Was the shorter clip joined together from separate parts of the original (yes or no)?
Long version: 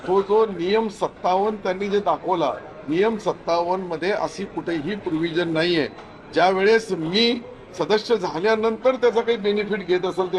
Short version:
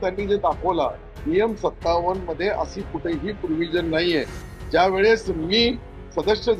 no